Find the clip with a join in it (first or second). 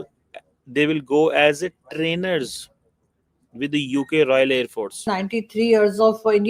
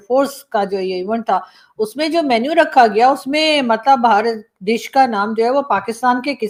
first